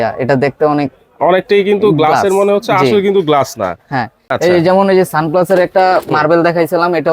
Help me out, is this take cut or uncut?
uncut